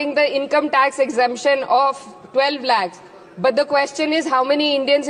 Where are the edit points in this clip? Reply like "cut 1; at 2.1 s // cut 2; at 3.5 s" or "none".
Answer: none